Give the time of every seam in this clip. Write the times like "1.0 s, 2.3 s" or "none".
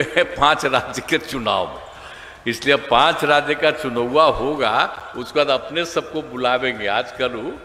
none